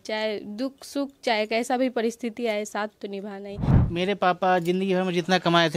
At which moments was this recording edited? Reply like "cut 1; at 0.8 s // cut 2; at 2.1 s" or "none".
cut 1; at 3.8 s